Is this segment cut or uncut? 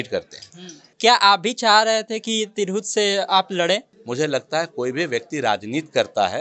cut